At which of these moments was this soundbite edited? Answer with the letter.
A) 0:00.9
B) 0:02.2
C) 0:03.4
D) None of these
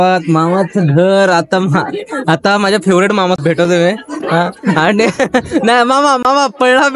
C